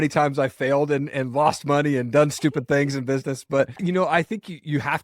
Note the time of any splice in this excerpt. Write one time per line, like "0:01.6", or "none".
0:03.8